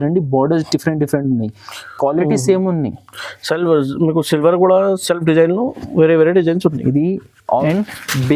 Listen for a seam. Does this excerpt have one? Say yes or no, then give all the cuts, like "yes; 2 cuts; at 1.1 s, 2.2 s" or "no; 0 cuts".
yes; 1 cut; at 7.3 s